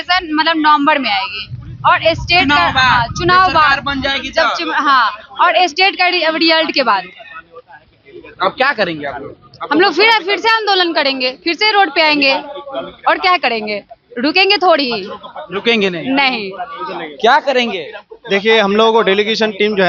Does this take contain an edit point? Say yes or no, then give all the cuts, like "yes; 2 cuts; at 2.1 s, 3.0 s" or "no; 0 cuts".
no; 0 cuts